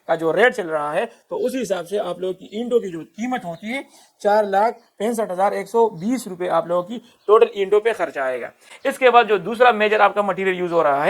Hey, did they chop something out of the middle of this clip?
no; 0 cuts

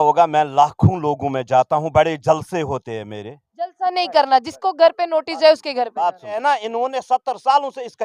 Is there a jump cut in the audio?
yes; 1 cut; at 6.4 s

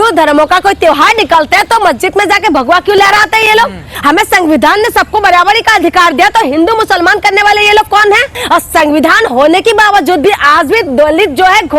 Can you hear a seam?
yes; 2 cuts; at 3.9 s, 8.4 s

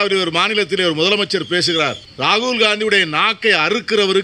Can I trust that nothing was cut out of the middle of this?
no; 1 cut; at 2.1 s

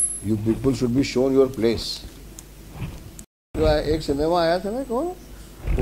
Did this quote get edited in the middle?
yes; 1 cut; at 3.5 s

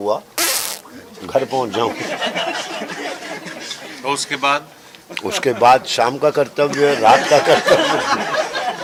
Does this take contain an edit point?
no; 0 cuts

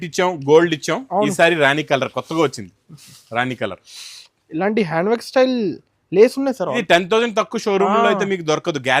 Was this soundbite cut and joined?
yes; 1 cut; at 6.8 s

